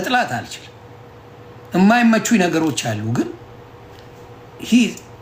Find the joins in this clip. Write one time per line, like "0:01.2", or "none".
none